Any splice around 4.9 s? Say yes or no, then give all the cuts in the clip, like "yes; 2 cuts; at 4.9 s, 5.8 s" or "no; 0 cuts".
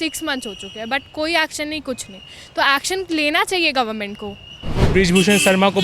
yes; 1 cut; at 4.9 s